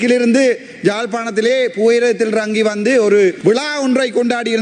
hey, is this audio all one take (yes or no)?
no